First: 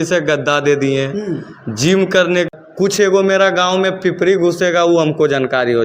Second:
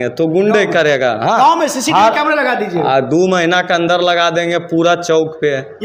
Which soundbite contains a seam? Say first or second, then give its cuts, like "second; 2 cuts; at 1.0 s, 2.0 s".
first; 1 cut; at 2.5 s